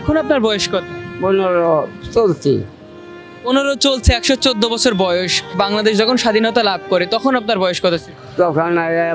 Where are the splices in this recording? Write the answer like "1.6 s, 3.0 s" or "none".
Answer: 1.0 s, 2.0 s, 8.2 s